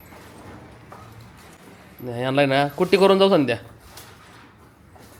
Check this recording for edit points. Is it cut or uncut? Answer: uncut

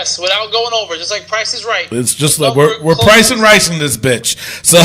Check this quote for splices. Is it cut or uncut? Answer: uncut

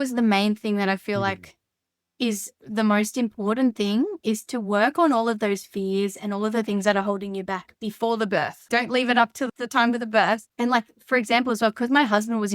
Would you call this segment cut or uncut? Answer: cut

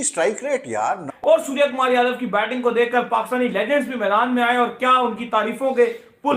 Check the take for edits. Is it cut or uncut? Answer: cut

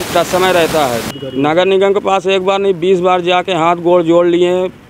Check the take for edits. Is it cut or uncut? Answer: cut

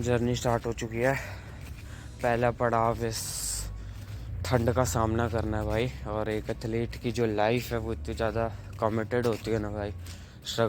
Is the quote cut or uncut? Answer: uncut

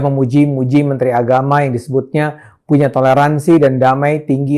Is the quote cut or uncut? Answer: uncut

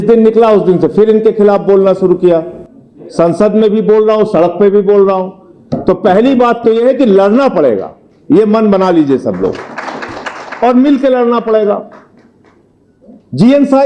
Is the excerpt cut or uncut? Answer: uncut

